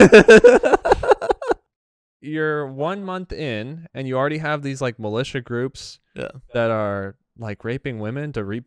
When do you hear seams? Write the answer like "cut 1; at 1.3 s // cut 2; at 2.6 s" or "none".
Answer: cut 1; at 1.6 s